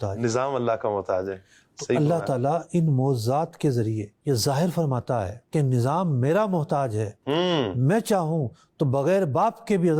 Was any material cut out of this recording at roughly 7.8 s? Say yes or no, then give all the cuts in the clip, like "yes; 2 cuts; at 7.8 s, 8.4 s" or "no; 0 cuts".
no; 0 cuts